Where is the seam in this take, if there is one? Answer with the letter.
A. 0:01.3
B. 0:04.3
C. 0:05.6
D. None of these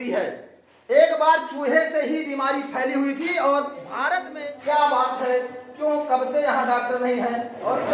B